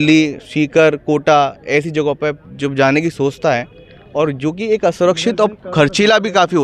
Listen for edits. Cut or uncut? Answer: uncut